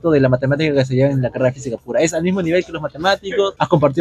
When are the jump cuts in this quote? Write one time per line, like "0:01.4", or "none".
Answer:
none